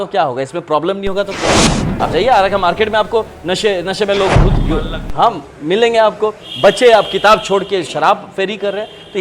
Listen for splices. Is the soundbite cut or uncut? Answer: cut